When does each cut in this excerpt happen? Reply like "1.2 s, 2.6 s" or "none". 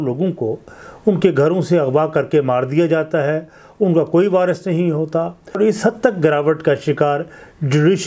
5.6 s